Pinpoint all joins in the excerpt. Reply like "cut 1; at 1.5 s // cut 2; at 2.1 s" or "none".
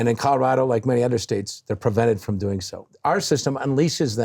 cut 1; at 2.9 s

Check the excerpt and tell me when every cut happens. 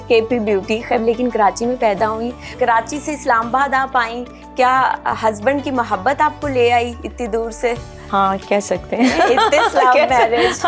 cut 1; at 1.0 s // cut 2; at 2.5 s

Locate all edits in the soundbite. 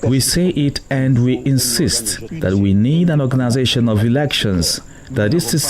cut 1; at 2.2 s

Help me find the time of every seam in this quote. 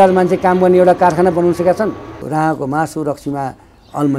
cut 1; at 2.2 s

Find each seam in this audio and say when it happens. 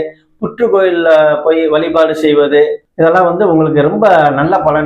cut 1; at 2.8 s

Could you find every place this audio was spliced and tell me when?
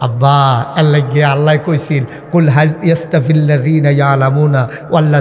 none

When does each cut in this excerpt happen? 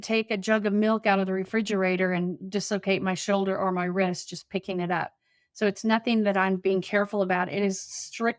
none

